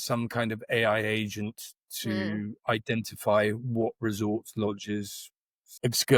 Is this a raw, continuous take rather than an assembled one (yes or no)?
yes